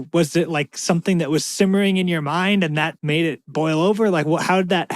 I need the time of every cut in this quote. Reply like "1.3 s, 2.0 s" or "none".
3.3 s

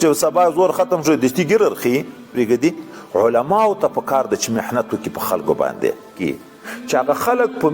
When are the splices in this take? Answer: 2.3 s, 6.2 s

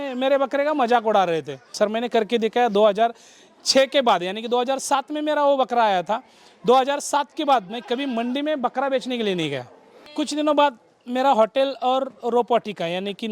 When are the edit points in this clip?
1.7 s, 10.1 s

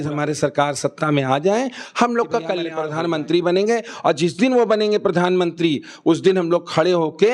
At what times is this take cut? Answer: 2.8 s

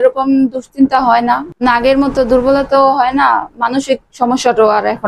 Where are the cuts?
1.4 s

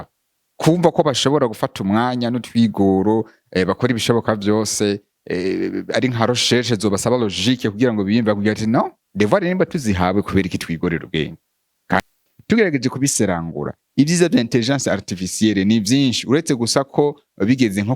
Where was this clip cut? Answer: 12.0 s

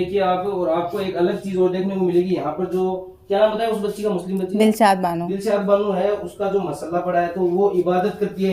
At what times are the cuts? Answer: none

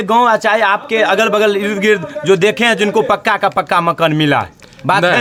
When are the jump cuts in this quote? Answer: none

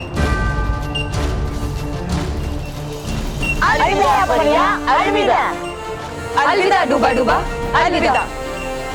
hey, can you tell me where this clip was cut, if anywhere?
none

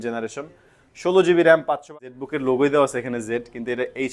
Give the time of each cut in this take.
1.8 s

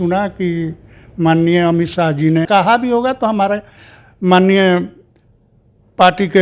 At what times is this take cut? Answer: 2.5 s

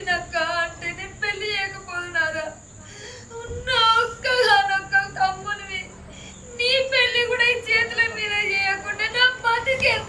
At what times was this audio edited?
none

